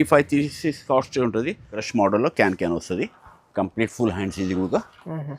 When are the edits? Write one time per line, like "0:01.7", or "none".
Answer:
0:01.8